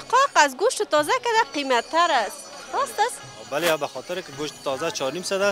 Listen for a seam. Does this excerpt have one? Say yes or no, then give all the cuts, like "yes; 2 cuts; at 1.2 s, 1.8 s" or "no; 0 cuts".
no; 0 cuts